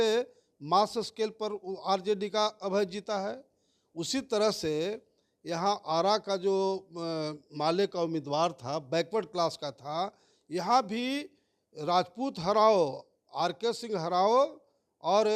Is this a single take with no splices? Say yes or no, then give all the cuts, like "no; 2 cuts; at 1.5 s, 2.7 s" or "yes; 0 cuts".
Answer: yes; 0 cuts